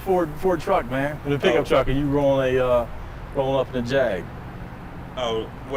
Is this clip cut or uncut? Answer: uncut